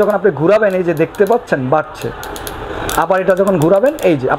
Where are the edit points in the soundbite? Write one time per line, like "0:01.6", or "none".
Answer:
none